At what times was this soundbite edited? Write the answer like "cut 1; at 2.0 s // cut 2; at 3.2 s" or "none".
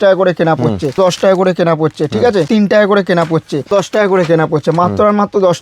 cut 1; at 1.0 s // cut 2; at 2.5 s // cut 3; at 3.7 s